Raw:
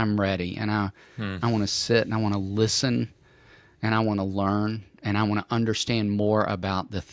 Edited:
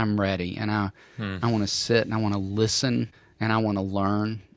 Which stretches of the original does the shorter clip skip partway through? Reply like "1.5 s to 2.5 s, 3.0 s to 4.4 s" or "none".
3.2 s to 3.7 s